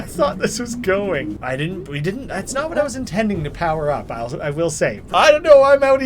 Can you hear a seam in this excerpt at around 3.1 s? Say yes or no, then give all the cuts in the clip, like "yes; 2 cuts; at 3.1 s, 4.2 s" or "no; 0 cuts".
no; 2 cuts; at 1.4 s, 5.0 s